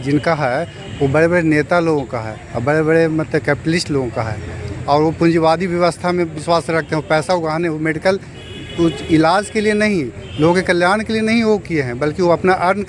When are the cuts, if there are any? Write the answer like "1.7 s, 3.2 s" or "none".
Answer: none